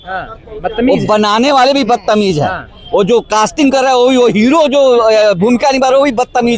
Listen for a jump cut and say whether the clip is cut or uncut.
uncut